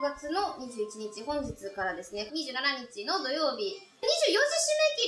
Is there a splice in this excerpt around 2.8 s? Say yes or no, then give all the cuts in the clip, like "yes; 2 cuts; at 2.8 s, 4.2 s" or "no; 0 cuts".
no; 1 cut; at 4.0 s